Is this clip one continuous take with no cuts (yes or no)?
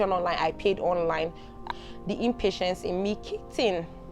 no